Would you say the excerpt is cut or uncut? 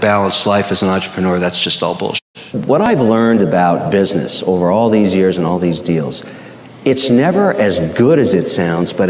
cut